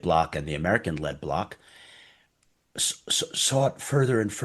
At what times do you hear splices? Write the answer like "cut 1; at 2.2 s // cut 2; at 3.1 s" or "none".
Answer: none